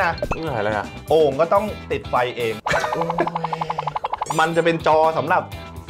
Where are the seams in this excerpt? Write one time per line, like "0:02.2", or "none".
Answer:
0:02.7
0:04.3